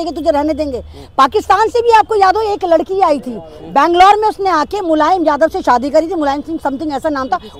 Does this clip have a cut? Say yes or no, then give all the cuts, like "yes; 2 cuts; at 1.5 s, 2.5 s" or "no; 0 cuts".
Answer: no; 0 cuts